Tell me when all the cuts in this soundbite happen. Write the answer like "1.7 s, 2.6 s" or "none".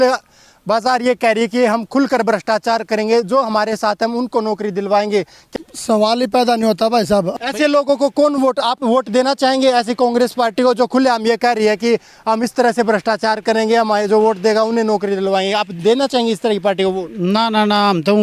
5.4 s, 7.3 s